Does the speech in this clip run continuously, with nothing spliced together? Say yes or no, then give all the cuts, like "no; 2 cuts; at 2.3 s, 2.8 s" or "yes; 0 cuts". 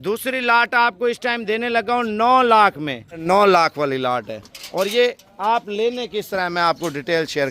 no; 1 cut; at 3.2 s